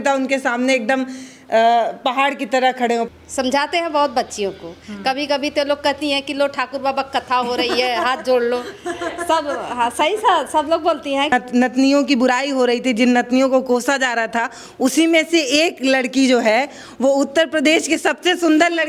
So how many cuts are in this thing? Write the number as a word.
two